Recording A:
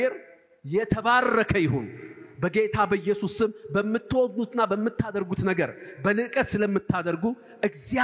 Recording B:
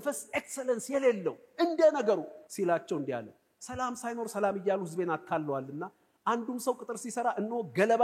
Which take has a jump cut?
B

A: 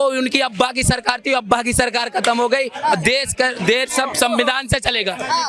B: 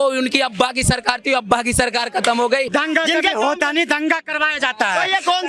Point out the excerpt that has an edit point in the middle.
B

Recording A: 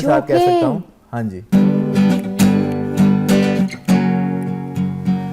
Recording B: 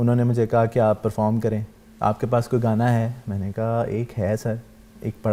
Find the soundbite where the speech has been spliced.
A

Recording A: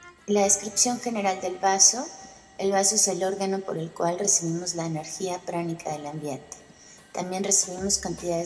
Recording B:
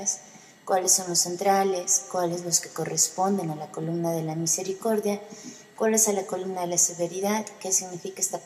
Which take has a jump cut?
B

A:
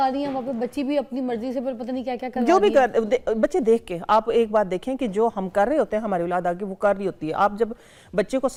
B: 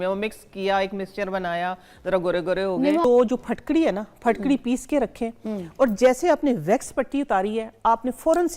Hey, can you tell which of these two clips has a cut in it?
B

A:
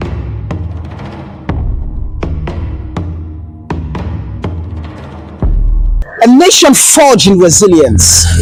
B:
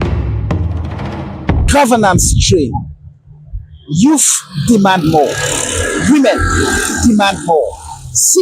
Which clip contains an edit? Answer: B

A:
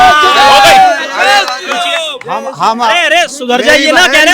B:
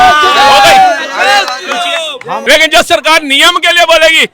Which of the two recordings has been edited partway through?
B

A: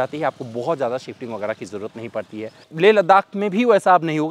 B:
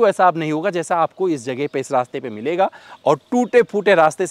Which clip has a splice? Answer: A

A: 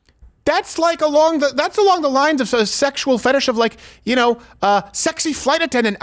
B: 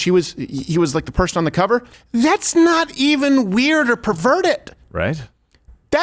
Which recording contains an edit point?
B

